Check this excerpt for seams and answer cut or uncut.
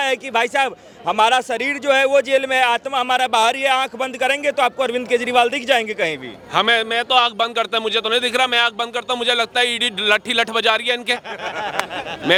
uncut